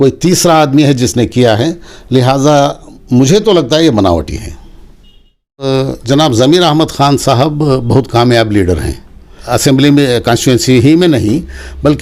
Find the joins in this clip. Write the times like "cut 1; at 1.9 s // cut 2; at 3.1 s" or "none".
cut 1; at 5.7 s // cut 2; at 9.4 s

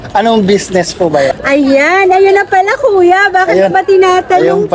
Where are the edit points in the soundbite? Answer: cut 1; at 1.4 s

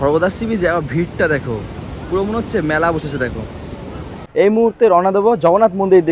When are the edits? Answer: cut 1; at 4.2 s

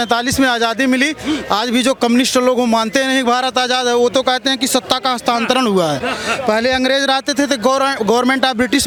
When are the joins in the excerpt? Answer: none

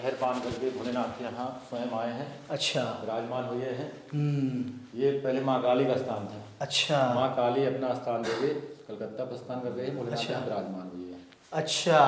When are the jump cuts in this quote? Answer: none

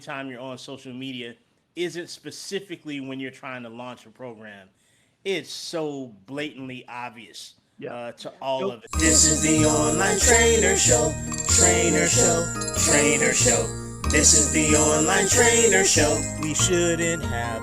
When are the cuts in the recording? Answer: cut 1; at 8.9 s

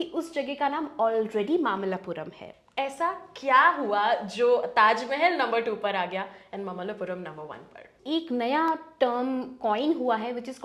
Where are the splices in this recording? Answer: cut 1; at 2.5 s // cut 2; at 7.9 s

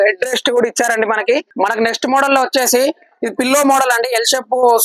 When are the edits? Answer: cut 1; at 1.5 s

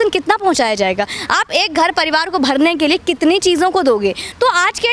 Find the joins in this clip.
none

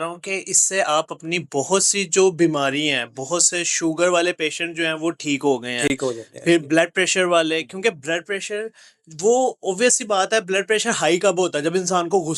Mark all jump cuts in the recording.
none

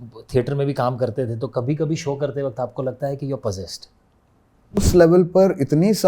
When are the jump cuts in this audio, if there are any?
cut 1; at 4.8 s

